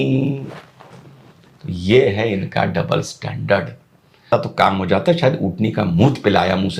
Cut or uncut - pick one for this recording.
cut